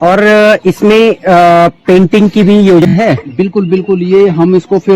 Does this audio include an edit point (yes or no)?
yes